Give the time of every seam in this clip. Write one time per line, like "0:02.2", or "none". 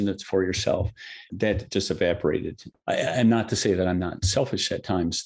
0:01.3

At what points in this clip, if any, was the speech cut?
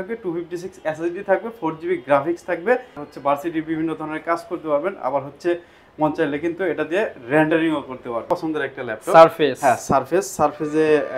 0:03.0
0:08.2

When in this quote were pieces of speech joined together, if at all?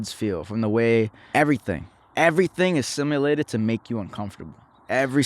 0:01.2

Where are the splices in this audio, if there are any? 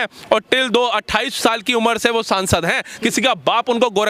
none

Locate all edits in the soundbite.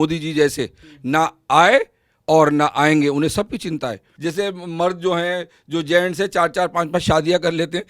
0:04.1

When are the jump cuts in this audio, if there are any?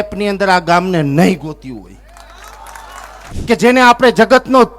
0:03.3

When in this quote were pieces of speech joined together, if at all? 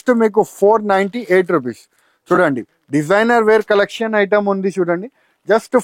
none

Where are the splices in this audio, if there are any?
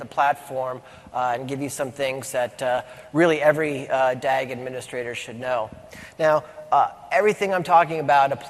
0:03.3

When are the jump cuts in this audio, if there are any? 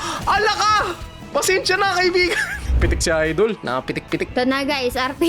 0:02.7

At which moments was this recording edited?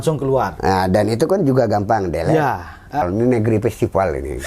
0:03.0

